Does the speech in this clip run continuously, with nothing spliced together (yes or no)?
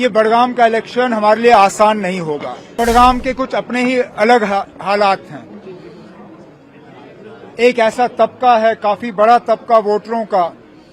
no